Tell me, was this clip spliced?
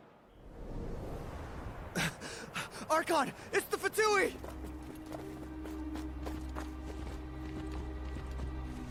no; 0 cuts

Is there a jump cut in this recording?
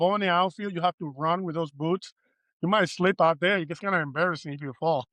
no; 0 cuts

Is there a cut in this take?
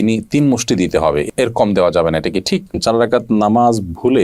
yes; 1 cut; at 2.8 s

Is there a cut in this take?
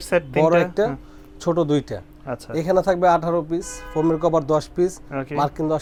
no; 0 cuts

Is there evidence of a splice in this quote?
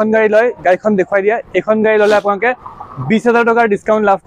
no; 0 cuts

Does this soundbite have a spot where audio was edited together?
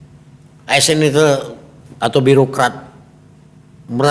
no; 0 cuts

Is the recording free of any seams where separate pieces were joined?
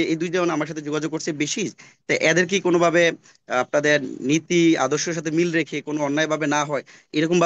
yes; 0 cuts

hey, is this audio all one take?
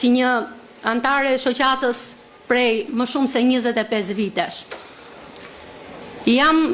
yes; 0 cuts

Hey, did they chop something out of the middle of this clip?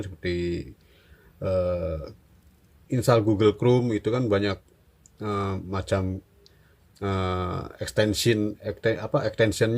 no; 0 cuts

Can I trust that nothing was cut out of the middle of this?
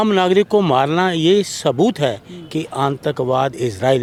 yes; 0 cuts

